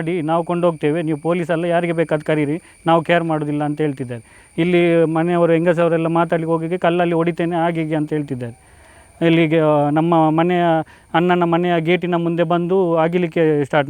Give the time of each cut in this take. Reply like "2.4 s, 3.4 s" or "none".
none